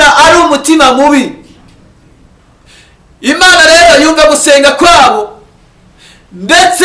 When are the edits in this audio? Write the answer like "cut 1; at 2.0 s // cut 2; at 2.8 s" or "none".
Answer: cut 1; at 2.4 s